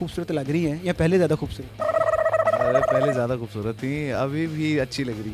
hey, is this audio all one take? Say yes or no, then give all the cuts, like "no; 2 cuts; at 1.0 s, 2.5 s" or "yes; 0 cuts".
yes; 0 cuts